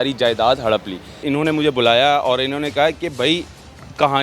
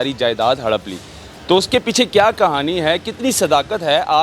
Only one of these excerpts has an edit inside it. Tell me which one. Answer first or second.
first